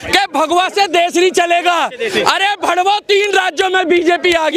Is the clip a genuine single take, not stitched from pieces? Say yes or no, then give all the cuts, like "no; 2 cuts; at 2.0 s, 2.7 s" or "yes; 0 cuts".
yes; 0 cuts